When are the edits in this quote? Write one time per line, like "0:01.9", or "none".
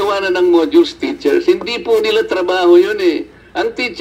none